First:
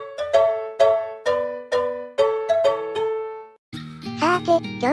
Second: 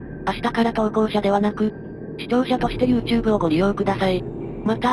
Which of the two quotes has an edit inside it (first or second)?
second